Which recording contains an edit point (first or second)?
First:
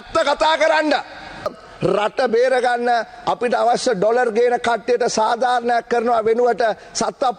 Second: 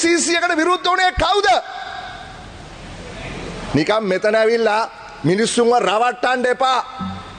first